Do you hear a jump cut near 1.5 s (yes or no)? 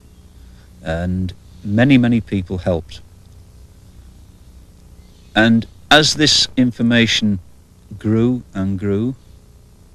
yes